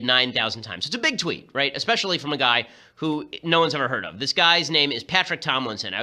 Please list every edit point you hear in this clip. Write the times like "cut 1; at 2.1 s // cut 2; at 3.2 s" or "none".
cut 1; at 3.5 s